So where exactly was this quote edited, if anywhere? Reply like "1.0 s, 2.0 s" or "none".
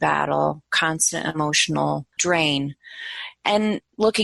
2.1 s